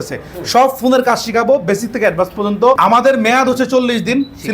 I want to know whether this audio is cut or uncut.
cut